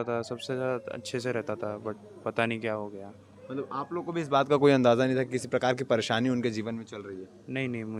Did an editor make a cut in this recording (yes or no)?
no